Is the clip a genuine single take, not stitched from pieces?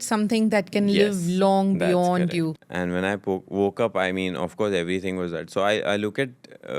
no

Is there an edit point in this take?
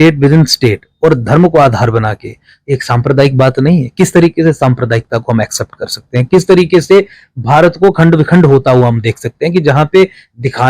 no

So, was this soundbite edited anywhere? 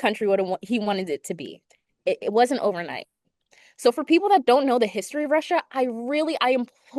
no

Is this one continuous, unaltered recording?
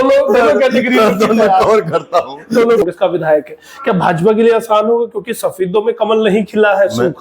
no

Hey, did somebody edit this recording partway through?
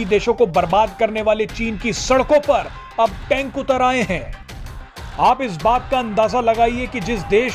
no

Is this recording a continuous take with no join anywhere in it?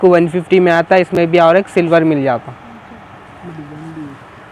yes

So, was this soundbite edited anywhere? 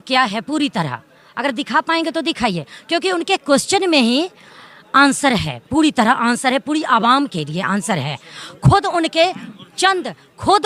no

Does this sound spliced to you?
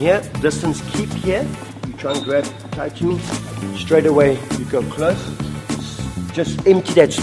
no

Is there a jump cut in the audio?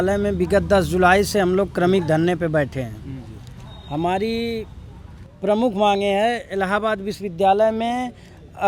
no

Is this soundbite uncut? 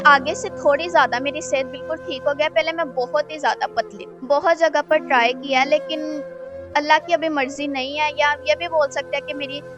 no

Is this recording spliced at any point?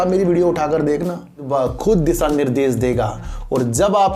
yes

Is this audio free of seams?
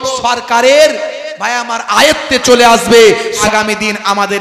no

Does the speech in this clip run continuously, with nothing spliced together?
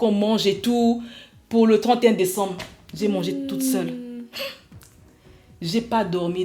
yes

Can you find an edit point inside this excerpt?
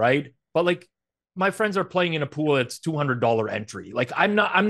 no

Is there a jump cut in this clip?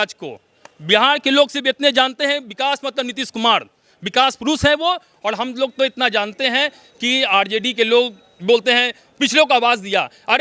no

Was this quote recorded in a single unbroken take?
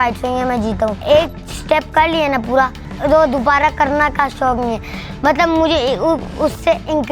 no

